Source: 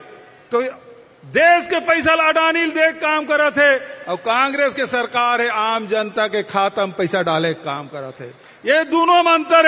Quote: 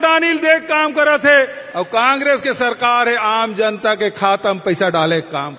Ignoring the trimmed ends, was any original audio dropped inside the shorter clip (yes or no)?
no